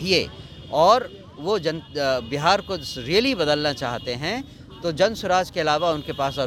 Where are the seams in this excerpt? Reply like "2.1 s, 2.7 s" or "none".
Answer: none